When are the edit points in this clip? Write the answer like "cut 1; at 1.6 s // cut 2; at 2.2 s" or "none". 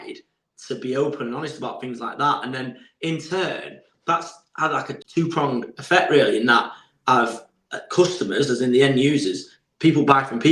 cut 1; at 5.0 s